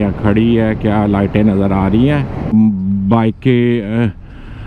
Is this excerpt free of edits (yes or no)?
no